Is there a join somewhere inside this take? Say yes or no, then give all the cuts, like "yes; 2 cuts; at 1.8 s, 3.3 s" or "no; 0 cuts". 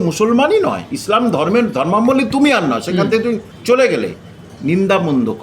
yes; 1 cut; at 3.5 s